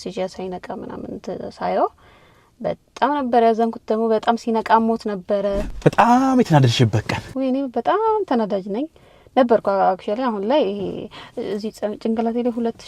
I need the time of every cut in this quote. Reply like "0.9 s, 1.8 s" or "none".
5.7 s, 7.2 s